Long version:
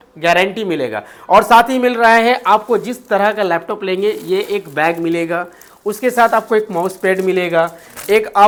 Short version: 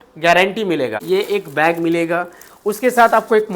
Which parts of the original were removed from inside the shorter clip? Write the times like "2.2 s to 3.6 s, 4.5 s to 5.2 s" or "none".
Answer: 1.0 s to 4.2 s